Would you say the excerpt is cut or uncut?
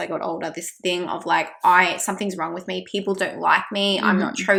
uncut